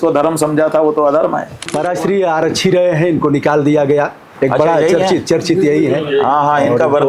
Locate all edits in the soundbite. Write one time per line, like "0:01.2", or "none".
0:01.6
0:04.2